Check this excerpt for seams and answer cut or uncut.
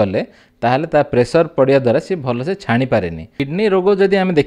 cut